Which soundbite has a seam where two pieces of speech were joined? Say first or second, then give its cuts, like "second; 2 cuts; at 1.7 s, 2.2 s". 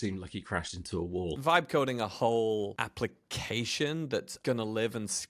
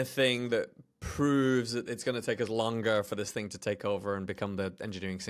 first; 3 cuts; at 1.4 s, 2.7 s, 4.3 s